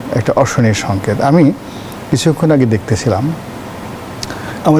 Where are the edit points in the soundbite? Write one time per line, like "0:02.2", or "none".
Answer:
none